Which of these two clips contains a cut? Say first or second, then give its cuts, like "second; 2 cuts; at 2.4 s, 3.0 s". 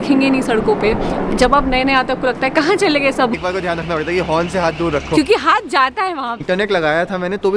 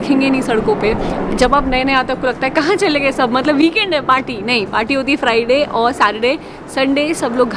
first; 2 cuts; at 3.3 s, 6.4 s